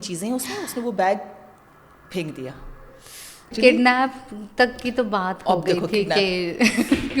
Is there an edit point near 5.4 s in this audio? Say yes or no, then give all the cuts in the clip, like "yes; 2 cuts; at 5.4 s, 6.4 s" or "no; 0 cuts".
no; 1 cut; at 3.5 s